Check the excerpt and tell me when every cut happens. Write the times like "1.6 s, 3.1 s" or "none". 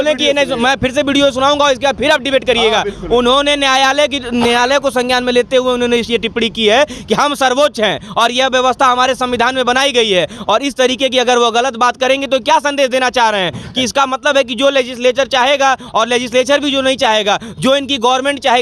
none